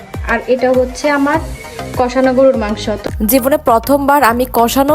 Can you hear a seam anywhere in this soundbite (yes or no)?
yes